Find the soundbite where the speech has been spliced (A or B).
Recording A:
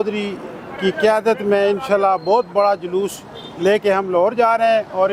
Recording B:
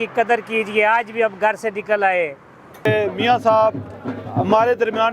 B